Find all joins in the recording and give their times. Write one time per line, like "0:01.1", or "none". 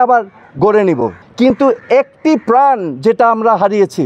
0:01.2